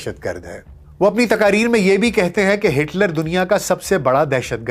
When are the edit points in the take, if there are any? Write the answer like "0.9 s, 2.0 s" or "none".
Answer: none